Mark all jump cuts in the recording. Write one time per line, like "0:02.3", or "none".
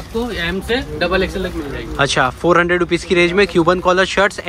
none